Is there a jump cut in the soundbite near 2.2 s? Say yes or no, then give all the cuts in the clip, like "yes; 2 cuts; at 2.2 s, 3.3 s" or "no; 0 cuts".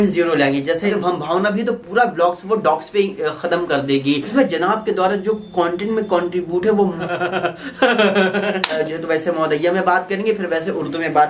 no; 4 cuts; at 0.8 s, 4.2 s, 7.0 s, 8.8 s